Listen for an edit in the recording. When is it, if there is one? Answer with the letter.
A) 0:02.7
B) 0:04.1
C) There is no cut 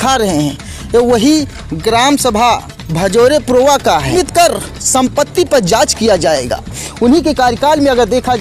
B